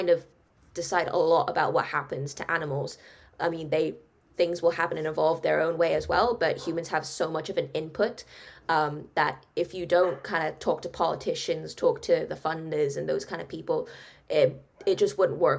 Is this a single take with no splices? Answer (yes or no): yes